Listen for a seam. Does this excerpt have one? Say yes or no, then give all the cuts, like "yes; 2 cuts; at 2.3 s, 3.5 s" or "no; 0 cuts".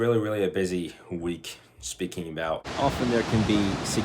yes; 1 cut; at 2.7 s